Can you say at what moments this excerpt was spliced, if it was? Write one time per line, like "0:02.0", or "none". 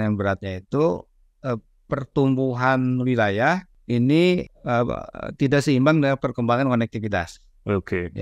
0:03.7
0:04.5